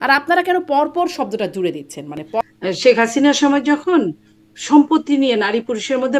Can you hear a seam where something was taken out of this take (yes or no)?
yes